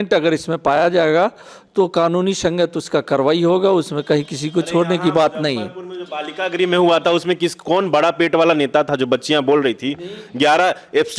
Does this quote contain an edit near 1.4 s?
no; 0 cuts

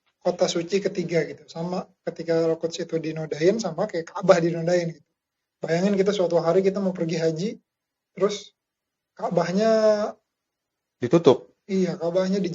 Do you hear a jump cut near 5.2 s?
no; 0 cuts

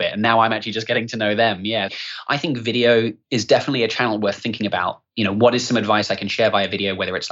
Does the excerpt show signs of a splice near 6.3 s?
no; 3 cuts; at 1.9 s, 3.2 s, 5.0 s

